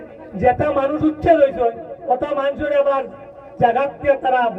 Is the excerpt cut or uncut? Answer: uncut